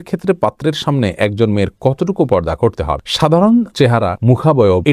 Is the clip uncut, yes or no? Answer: yes